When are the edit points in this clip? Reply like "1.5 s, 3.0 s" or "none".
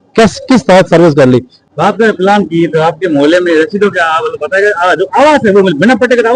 1.5 s